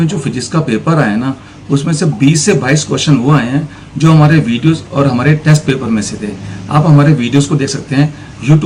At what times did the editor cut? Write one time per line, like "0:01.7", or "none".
none